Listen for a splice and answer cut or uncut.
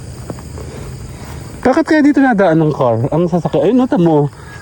uncut